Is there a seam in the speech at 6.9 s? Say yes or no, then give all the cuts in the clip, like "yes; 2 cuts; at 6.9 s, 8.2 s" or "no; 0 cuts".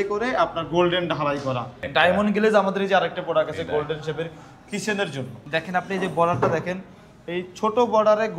no; 2 cuts; at 1.8 s, 5.4 s